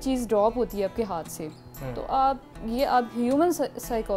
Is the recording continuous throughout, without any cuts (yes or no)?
yes